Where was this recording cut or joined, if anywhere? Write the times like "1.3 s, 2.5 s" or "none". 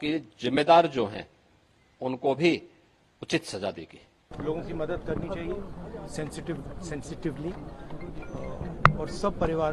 4.3 s